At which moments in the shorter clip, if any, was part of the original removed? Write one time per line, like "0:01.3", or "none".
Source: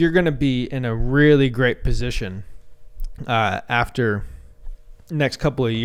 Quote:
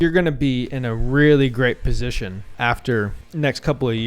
0:02.5
0:03.2